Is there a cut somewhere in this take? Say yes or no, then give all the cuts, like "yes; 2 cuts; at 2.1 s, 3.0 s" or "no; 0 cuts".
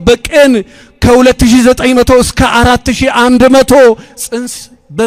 no; 0 cuts